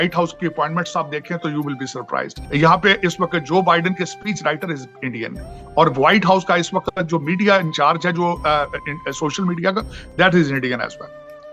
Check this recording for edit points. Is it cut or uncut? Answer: cut